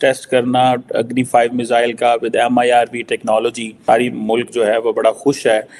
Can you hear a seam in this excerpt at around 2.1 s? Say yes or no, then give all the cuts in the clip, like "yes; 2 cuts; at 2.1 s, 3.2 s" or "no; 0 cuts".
no; 1 cut; at 3.7 s